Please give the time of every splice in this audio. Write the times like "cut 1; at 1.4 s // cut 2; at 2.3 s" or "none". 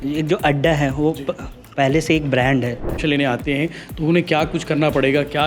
cut 1; at 3.0 s